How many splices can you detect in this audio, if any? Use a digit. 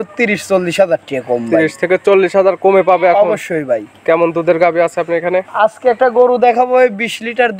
0